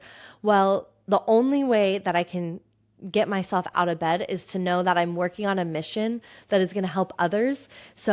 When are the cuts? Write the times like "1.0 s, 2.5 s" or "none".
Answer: none